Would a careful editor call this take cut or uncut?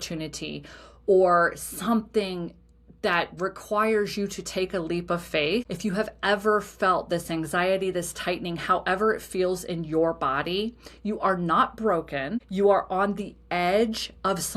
cut